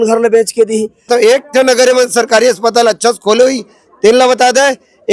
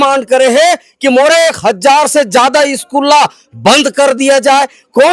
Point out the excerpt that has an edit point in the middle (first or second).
first